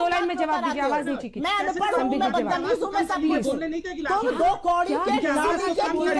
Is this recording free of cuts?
yes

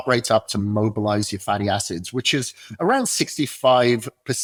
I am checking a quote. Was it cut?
no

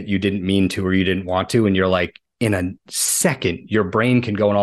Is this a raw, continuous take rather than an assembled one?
no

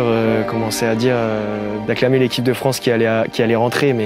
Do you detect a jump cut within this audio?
yes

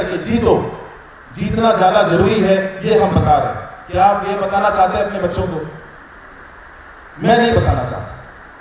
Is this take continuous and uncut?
yes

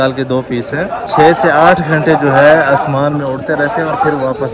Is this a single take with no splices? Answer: no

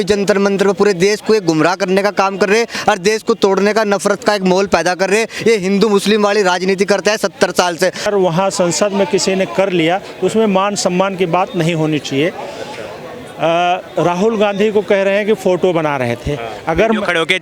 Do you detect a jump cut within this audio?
yes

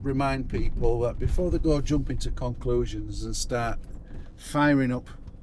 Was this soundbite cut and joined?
no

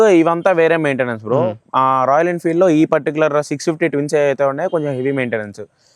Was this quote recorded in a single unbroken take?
yes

